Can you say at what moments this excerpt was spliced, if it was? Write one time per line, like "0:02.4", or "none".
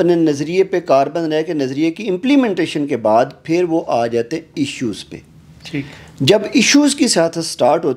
none